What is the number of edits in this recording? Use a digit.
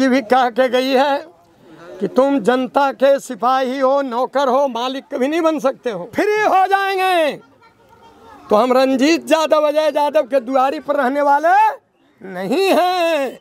1